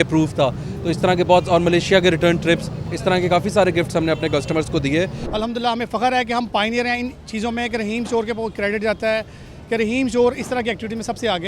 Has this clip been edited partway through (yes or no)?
yes